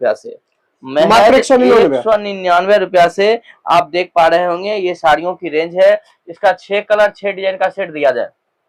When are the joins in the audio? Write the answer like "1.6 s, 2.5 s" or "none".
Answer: none